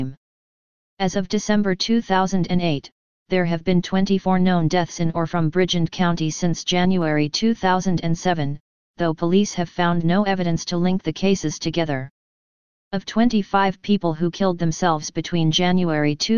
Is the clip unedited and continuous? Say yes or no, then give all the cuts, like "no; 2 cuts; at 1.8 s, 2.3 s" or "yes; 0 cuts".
yes; 0 cuts